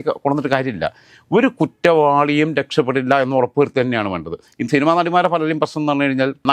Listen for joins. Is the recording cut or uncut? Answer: uncut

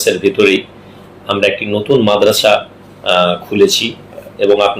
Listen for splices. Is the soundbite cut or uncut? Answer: uncut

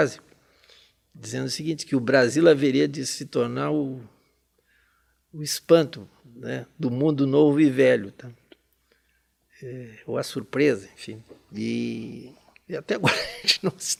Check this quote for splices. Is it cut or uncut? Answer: uncut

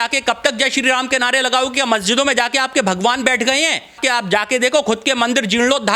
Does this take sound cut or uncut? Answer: cut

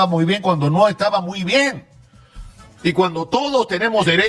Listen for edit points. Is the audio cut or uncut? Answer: uncut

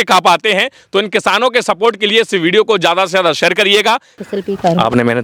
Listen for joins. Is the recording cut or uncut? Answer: cut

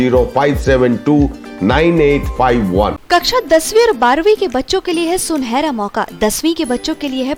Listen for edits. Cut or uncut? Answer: uncut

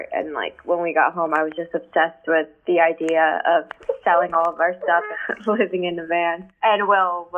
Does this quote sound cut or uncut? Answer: uncut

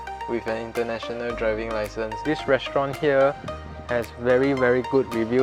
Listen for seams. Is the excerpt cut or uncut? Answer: cut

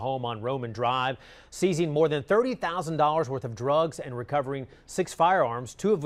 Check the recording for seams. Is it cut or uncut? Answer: uncut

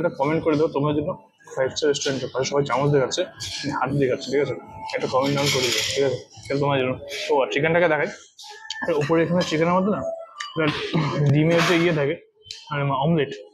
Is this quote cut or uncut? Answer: uncut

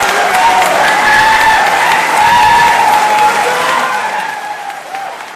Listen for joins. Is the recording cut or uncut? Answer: uncut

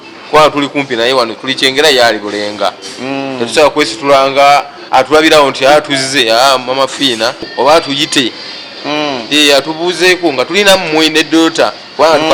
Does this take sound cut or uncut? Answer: uncut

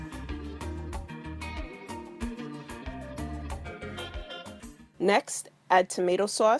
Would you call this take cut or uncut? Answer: uncut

